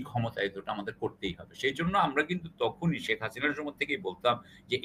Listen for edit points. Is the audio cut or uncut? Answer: uncut